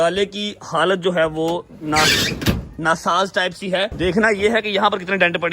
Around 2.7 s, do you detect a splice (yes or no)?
no